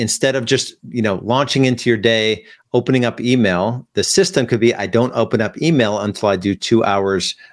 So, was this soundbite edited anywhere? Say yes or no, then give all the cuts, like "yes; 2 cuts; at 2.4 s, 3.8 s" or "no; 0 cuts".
no; 0 cuts